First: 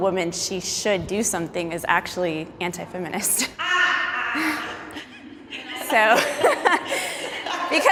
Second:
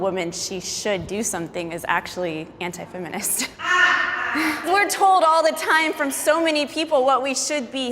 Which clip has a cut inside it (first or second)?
second